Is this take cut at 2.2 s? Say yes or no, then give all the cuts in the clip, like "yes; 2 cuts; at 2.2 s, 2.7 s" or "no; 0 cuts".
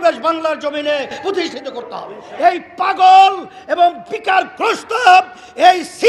yes; 1 cut; at 2.2 s